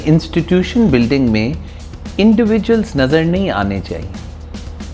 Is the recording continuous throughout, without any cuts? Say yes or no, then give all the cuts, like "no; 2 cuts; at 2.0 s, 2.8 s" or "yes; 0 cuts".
yes; 0 cuts